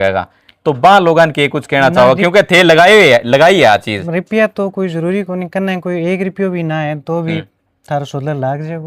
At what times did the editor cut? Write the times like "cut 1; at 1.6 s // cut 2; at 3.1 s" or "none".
none